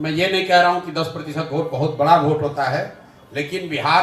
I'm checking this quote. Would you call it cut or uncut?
uncut